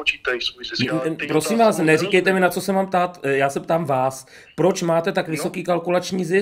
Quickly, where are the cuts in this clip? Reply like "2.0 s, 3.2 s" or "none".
none